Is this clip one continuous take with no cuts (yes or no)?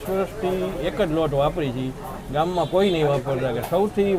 yes